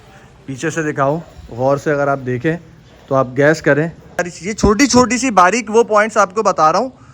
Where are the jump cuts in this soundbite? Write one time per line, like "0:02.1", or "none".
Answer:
0:04.3